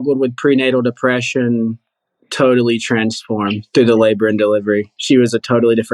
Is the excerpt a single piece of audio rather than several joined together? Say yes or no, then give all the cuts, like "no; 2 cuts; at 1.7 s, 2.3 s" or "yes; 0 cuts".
no; 1 cut; at 4.9 s